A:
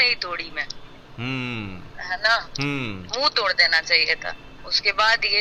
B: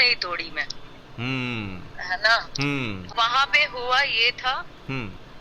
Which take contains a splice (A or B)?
B